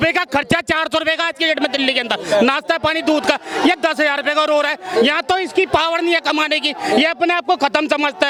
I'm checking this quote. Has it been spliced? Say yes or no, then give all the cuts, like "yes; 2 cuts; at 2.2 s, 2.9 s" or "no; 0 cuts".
no; 0 cuts